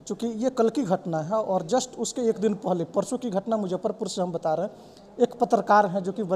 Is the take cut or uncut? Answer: uncut